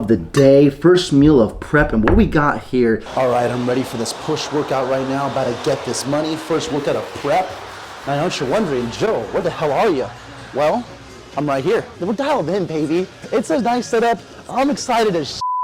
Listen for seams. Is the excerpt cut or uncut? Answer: cut